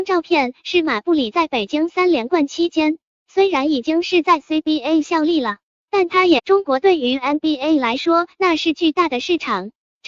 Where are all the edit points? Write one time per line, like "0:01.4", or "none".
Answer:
none